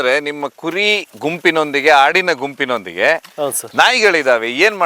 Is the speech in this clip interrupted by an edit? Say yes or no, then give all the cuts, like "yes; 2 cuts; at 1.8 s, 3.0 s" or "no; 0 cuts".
no; 0 cuts